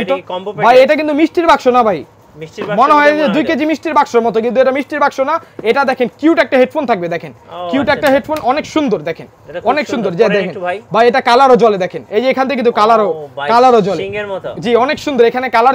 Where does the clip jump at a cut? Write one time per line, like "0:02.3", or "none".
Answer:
none